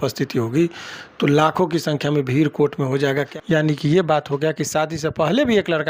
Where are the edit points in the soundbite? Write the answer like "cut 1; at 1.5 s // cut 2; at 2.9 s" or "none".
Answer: cut 1; at 3.3 s